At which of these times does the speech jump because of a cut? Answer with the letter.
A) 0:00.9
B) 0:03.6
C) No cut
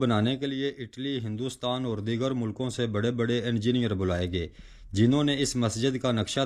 C